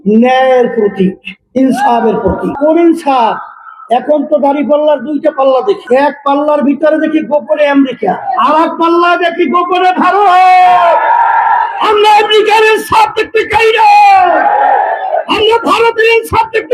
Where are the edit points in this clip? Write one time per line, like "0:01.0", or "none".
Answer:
0:02.5
0:05.8
0:08.3
0:11.8